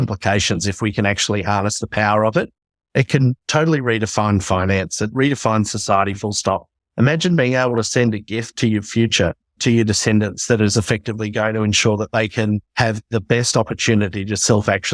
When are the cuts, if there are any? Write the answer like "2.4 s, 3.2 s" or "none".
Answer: 5.1 s, 9.6 s, 12.7 s

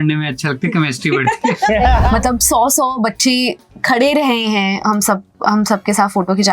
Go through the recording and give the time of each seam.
2.0 s

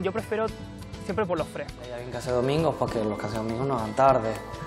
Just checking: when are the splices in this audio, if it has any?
2.1 s

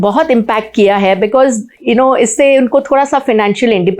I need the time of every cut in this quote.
none

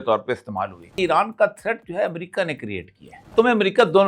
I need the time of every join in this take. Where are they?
1.0 s, 3.3 s

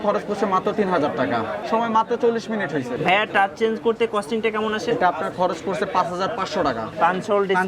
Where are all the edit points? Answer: 1.6 s, 3.0 s, 6.9 s

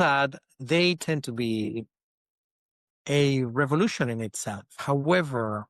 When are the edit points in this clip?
4.7 s

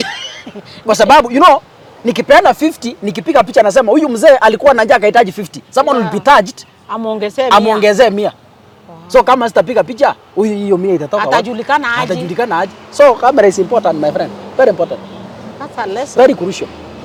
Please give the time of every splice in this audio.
none

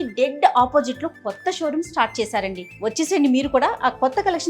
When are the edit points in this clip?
2.6 s

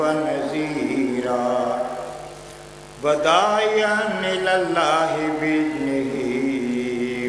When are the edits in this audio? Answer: 1.7 s

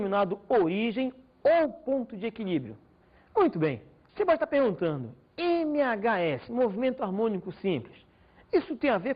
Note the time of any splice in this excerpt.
6.6 s

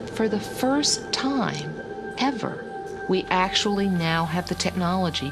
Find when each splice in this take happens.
none

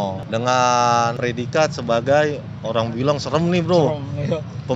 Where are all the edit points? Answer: none

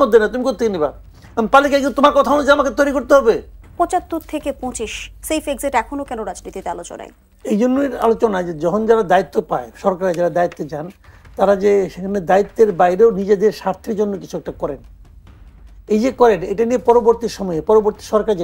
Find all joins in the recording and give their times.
3.6 s

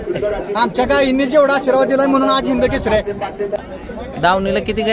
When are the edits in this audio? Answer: 3.6 s

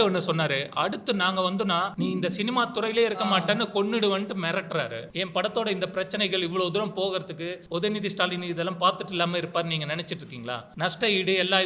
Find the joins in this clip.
1.9 s, 5.1 s, 7.6 s, 10.7 s

